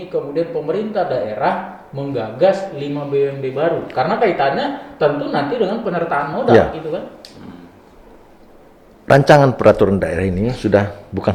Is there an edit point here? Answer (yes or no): no